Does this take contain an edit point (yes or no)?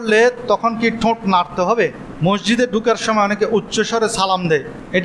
yes